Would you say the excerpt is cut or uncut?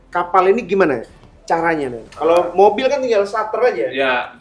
uncut